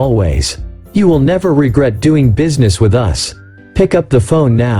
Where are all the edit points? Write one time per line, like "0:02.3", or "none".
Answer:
none